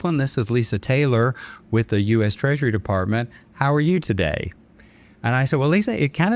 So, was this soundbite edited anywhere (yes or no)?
no